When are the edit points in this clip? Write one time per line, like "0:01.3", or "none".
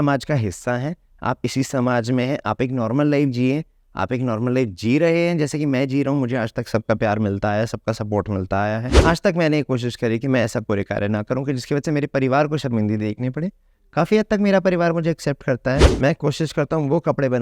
0:08.9
0:15.8